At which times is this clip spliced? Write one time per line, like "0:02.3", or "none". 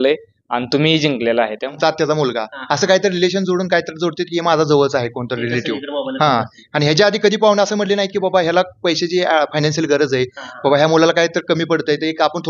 0:01.8